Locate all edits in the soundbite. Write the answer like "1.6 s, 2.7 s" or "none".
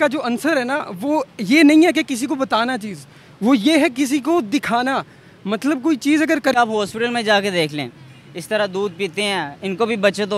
6.6 s

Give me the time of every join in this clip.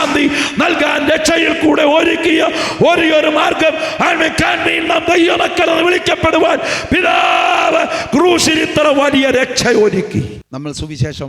10.3 s

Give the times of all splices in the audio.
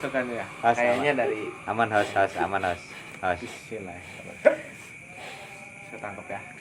none

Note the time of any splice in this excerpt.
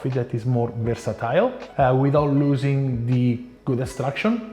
1.6 s, 3.5 s

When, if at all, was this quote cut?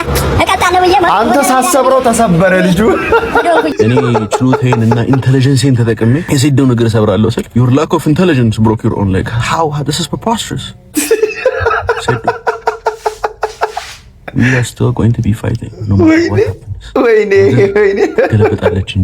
3.7 s, 6.2 s, 7.4 s

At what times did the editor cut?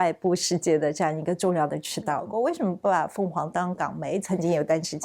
2.3 s

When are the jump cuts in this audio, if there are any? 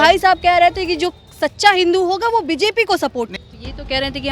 3.4 s

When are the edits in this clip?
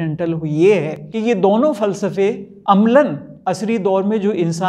1.0 s, 2.5 s, 3.3 s

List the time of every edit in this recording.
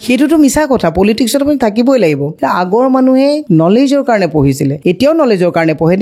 2.3 s, 3.4 s, 4.7 s

